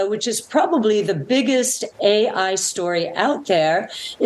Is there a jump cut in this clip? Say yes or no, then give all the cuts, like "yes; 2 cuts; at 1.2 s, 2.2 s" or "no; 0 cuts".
no; 0 cuts